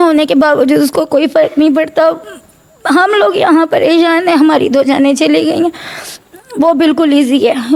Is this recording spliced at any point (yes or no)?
no